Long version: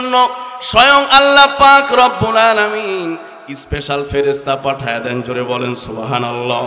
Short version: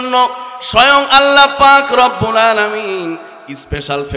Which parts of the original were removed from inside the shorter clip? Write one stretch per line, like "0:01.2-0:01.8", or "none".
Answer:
none